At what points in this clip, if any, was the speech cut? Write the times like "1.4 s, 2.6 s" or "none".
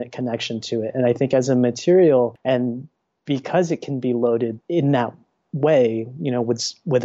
2.4 s, 4.5 s